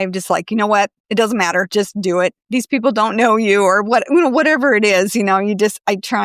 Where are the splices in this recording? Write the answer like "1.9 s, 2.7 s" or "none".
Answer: 1.0 s, 2.4 s